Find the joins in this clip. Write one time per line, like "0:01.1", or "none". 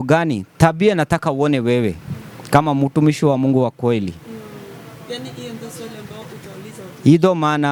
none